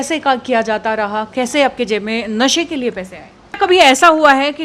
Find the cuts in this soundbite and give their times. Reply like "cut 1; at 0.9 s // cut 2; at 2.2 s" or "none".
cut 1; at 3.6 s